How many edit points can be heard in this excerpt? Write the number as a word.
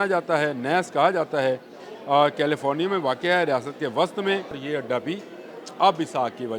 one